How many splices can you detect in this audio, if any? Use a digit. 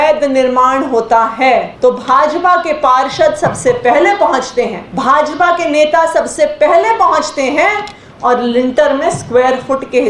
2